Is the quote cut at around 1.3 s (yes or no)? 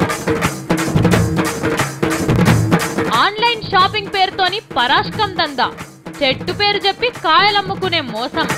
no